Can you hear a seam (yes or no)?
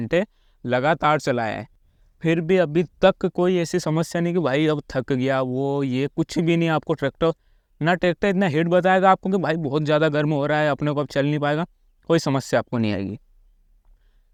no